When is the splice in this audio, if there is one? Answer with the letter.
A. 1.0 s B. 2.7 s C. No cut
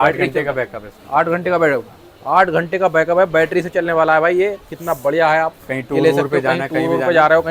C